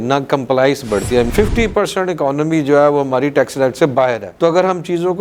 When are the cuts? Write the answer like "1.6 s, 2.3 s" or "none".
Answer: 1.3 s